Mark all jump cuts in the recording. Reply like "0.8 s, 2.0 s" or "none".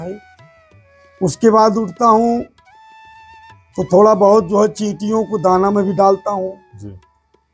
none